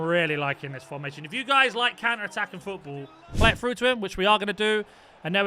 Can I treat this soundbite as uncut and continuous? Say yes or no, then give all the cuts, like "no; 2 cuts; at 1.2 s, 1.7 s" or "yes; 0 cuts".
no; 1 cut; at 3.3 s